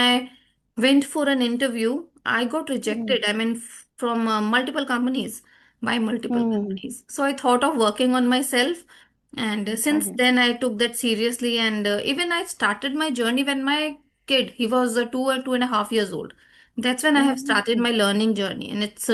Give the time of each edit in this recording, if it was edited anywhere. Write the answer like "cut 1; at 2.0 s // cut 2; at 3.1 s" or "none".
none

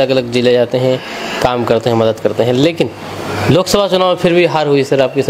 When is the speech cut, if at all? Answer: none

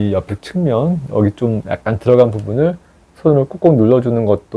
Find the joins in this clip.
none

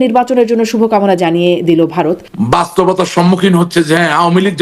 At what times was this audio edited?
cut 1; at 2.3 s

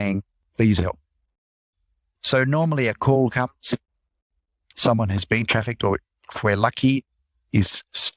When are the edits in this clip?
cut 1; at 2.1 s // cut 2; at 4.7 s

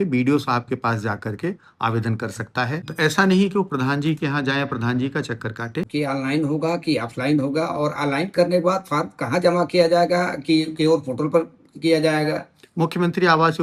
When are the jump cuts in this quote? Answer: cut 1; at 2.8 s // cut 2; at 5.9 s

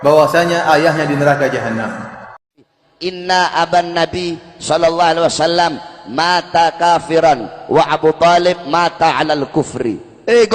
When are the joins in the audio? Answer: cut 1; at 2.6 s

